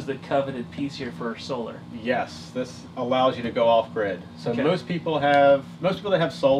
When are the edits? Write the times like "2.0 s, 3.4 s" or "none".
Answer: none